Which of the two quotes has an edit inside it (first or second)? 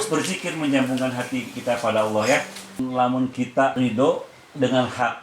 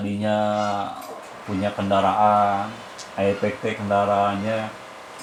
first